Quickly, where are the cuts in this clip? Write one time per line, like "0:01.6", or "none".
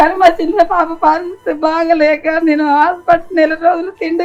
none